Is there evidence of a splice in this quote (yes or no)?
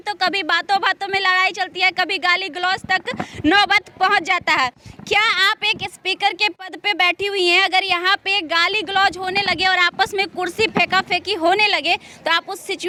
no